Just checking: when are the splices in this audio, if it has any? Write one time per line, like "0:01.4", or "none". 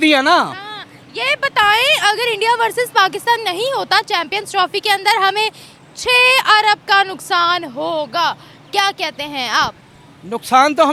none